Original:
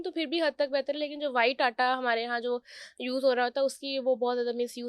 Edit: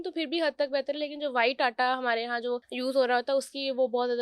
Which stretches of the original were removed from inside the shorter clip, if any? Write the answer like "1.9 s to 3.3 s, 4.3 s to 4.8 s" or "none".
2.7 s to 3.0 s

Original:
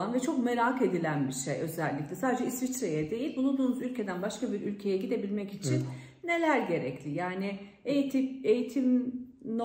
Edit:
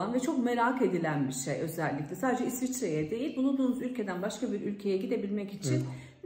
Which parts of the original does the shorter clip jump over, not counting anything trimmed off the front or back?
none

